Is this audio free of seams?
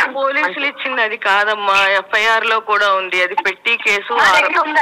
yes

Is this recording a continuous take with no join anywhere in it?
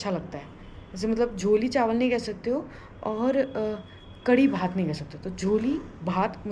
yes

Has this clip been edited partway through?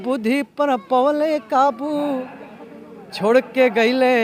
no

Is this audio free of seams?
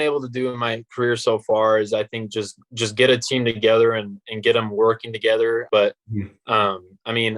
no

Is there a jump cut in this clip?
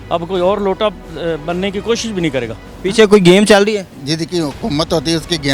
yes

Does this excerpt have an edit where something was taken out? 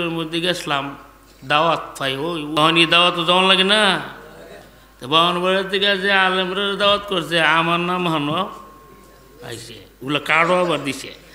yes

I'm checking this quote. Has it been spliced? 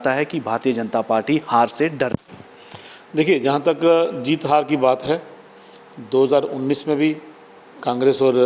no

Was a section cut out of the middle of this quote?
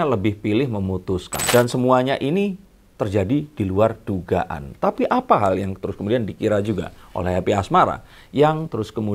yes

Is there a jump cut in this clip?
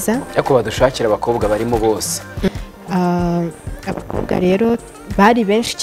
yes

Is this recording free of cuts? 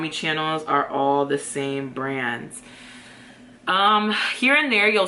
yes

